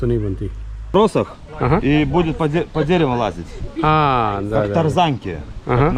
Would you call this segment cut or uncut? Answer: cut